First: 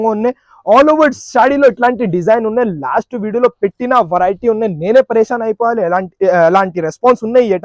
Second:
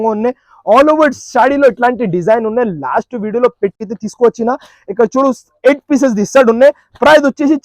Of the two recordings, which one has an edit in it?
second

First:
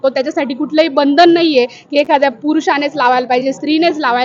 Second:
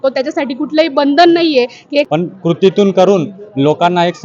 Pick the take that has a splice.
second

